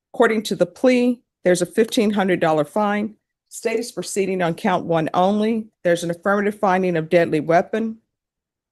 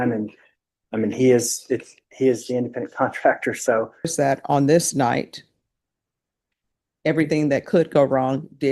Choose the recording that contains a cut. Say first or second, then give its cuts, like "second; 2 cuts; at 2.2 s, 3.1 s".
second; 1 cut; at 4.1 s